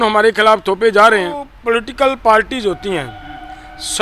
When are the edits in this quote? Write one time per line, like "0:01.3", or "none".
0:01.5